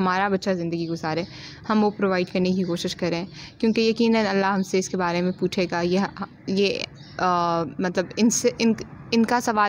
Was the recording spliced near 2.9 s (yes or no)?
no